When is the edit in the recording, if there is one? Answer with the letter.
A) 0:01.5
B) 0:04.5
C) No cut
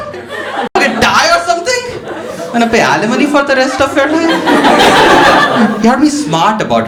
C